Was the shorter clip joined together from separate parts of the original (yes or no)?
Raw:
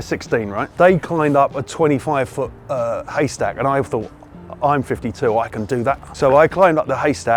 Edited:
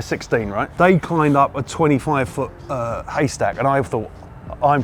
no